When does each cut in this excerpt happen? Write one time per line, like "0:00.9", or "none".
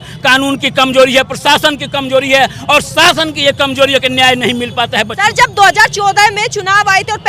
none